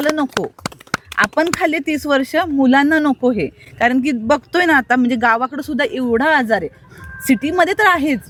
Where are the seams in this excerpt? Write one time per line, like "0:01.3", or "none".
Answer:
none